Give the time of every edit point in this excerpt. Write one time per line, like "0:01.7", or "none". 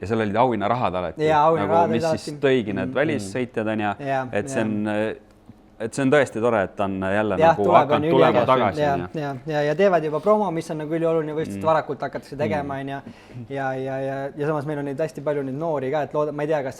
none